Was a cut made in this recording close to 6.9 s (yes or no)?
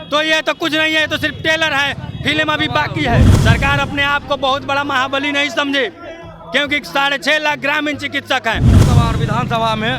no